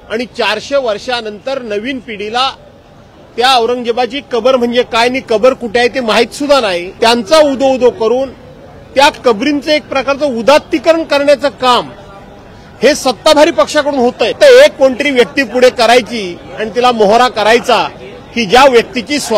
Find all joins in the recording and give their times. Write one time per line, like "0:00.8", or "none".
0:06.9
0:14.3